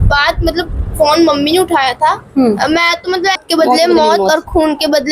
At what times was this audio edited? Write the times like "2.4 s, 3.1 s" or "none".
3.4 s